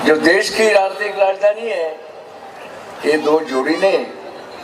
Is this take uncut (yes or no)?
yes